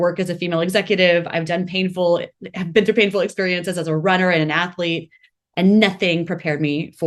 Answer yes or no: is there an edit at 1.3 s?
no